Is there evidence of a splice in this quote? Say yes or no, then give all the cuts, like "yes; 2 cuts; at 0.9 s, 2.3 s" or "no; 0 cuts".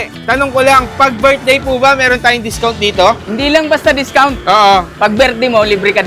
yes; 1 cut; at 3.3 s